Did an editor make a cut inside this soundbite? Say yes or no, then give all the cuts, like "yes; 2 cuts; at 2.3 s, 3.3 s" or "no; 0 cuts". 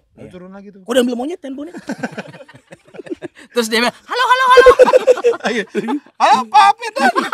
no; 0 cuts